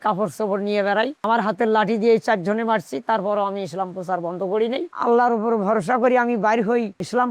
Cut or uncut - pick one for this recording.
cut